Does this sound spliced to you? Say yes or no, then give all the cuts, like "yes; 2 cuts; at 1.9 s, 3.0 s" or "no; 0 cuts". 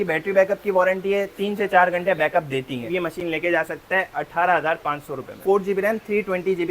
yes; 2 cuts; at 2.9 s, 5.4 s